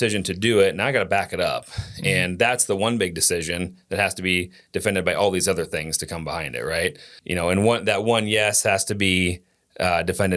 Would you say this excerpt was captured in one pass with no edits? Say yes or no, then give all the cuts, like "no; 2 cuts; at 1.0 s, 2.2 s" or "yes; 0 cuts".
no; 1 cut; at 7.1 s